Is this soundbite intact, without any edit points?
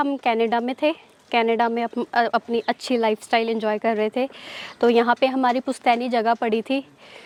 yes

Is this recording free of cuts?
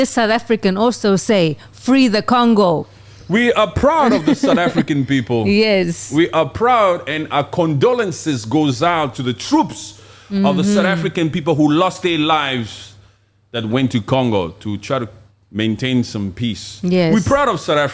yes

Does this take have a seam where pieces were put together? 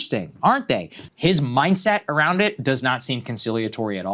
yes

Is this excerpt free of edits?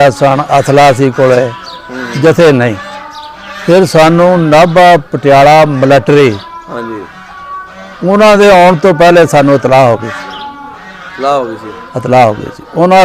yes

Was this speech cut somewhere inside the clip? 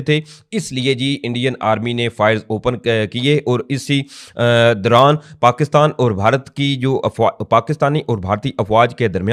no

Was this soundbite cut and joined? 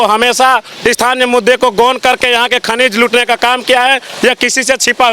no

